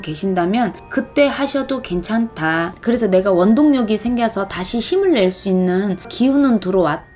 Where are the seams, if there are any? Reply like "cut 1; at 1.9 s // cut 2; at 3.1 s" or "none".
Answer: cut 1; at 2.7 s // cut 2; at 6.1 s